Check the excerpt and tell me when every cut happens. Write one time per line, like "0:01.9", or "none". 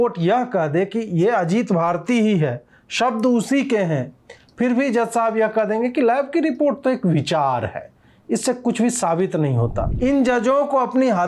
0:09.8